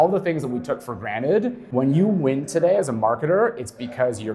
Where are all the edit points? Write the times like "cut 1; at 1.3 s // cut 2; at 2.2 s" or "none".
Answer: cut 1; at 1.6 s